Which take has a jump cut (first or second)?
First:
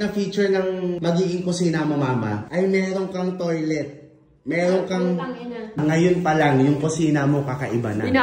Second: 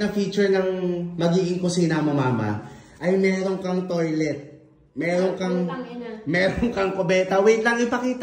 first